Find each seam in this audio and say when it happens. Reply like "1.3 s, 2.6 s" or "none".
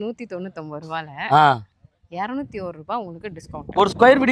none